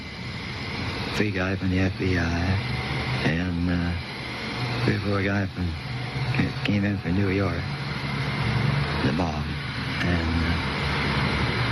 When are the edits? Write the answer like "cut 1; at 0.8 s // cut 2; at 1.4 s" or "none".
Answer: cut 1; at 6.6 s